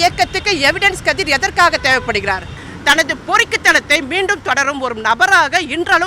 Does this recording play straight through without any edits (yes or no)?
no